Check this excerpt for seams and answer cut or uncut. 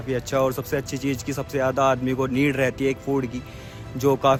uncut